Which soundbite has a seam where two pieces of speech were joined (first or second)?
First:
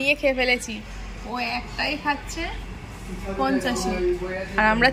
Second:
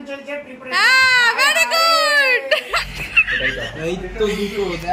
second